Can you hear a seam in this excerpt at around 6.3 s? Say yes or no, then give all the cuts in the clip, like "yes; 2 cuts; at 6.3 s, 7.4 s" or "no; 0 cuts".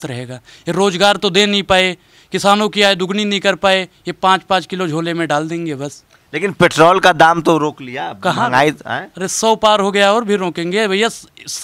no; 0 cuts